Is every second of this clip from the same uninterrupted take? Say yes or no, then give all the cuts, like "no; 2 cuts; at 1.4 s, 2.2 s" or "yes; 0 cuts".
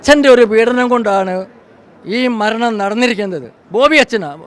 yes; 0 cuts